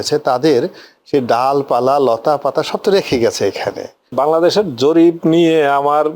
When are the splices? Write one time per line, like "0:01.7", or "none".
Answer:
0:04.1